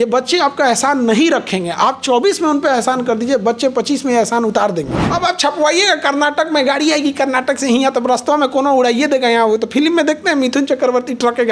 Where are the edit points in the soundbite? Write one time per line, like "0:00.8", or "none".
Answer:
0:05.1